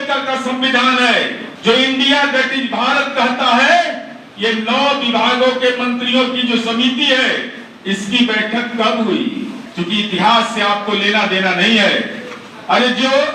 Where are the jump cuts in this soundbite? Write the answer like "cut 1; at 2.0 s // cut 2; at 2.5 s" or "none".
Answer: cut 1; at 1.5 s // cut 2; at 9.6 s